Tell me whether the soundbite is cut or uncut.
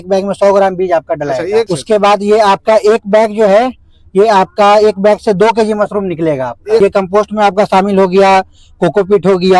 cut